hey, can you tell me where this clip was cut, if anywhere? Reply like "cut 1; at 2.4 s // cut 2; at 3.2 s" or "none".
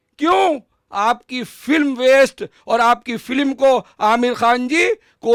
none